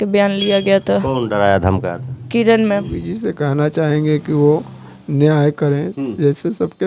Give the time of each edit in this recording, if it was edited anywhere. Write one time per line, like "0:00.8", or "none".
0:03.0